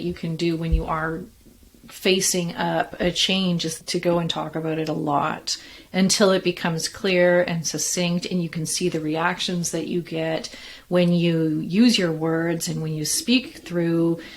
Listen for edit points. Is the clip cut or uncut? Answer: cut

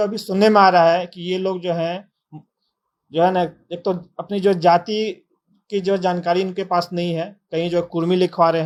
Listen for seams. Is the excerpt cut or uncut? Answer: uncut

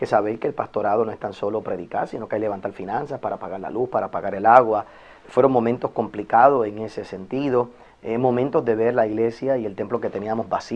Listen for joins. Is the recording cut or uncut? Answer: uncut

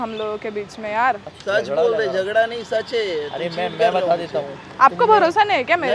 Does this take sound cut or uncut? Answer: uncut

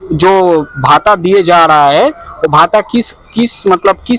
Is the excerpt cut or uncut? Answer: uncut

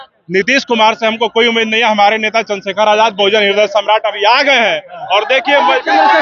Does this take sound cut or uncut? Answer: uncut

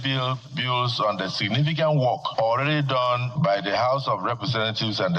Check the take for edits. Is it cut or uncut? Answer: cut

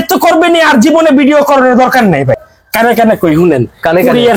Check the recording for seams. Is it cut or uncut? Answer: cut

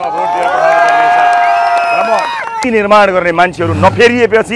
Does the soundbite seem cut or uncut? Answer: cut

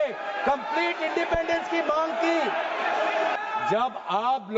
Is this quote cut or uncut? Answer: cut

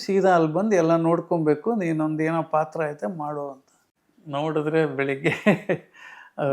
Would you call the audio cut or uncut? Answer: cut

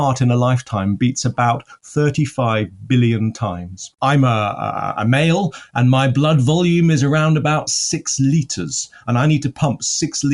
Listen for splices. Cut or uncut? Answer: cut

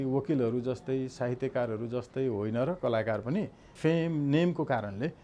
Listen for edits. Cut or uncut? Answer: cut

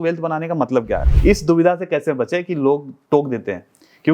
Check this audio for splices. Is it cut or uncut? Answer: cut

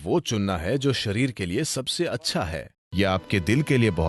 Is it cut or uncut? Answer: cut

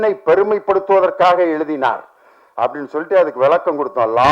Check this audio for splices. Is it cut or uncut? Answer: uncut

